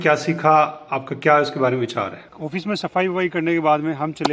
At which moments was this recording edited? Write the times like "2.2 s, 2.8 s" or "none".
2.2 s

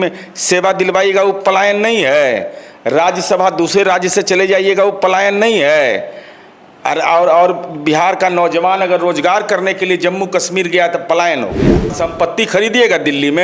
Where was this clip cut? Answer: 11.9 s

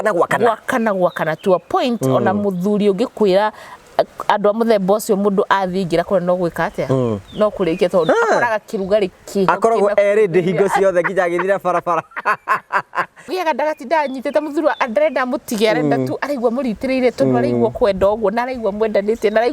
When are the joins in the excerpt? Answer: 13.3 s

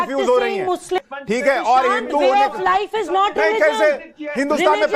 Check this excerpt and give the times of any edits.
1.1 s

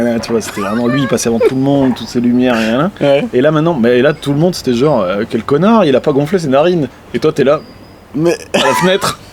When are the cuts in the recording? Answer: none

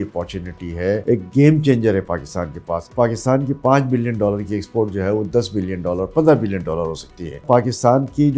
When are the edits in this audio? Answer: 1.0 s, 2.9 s, 7.4 s

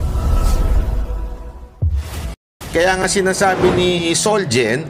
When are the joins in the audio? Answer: 2.5 s

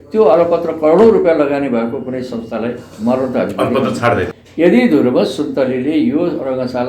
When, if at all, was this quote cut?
4.4 s

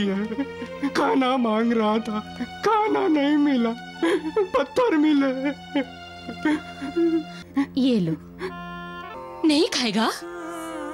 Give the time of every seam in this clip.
7.4 s, 9.0 s

